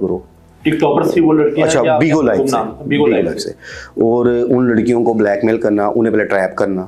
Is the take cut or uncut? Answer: uncut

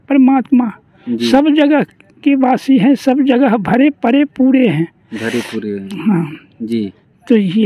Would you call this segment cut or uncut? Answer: uncut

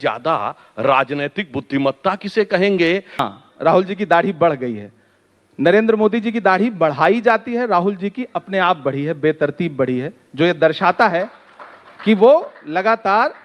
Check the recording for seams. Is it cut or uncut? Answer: cut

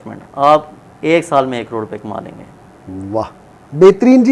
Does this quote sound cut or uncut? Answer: uncut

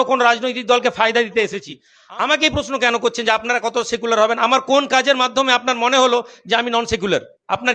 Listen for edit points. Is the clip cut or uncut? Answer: cut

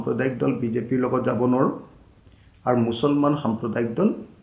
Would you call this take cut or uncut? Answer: uncut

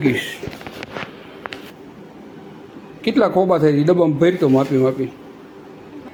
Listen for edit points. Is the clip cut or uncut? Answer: uncut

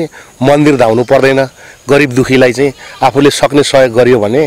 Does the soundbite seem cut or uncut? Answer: uncut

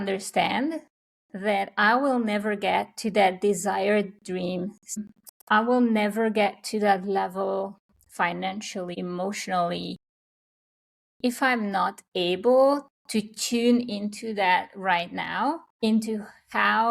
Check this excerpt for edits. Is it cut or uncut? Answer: cut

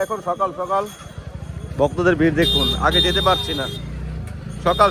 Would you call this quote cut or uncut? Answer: uncut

